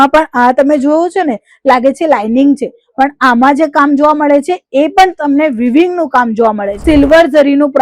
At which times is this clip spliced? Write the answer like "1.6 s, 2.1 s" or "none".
6.7 s